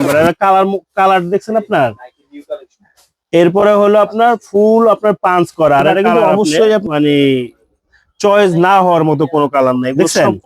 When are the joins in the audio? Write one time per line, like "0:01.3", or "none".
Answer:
0:06.8